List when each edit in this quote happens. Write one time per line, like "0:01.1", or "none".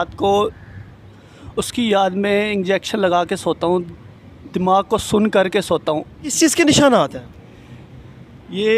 0:06.2